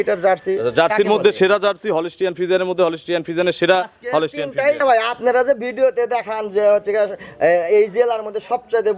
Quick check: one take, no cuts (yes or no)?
no